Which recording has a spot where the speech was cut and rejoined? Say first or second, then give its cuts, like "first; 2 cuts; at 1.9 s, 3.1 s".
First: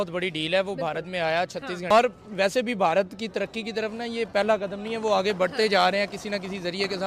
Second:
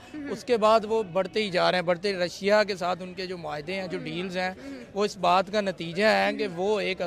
first; 1 cut; at 1.9 s